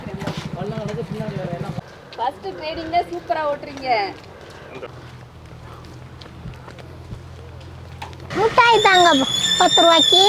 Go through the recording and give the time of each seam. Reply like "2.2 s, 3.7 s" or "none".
1.8 s, 4.9 s, 8.3 s

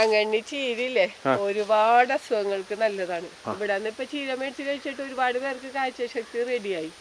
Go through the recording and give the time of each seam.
3.5 s

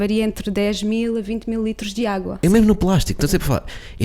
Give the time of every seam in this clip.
2.4 s

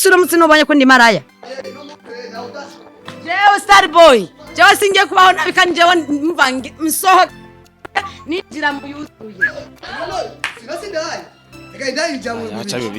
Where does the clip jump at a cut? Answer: 1.4 s

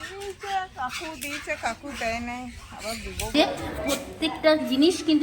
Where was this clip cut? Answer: 3.3 s

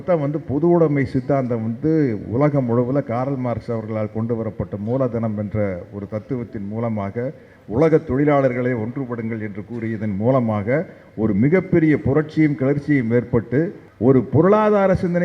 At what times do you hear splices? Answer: 13.8 s

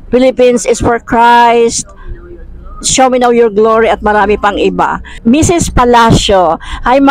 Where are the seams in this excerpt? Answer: 5.1 s

